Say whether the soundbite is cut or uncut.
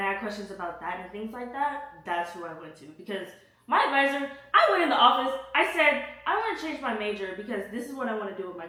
uncut